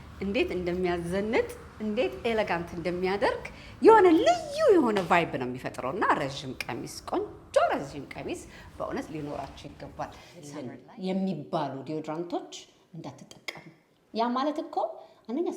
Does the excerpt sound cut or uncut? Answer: cut